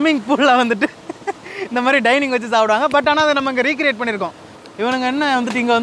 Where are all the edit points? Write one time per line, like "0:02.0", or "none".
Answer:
0:04.5